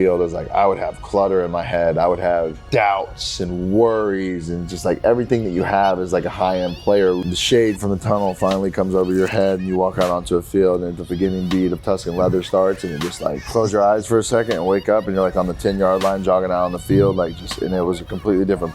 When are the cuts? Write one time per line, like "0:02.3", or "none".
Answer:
0:02.6
0:07.2
0:11.0
0:13.4